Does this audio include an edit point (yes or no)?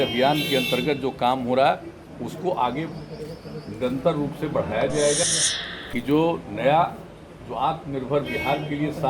yes